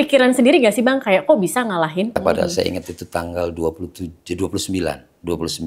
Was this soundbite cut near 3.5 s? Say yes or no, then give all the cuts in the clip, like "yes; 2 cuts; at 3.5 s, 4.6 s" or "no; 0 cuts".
no; 1 cut; at 2.1 s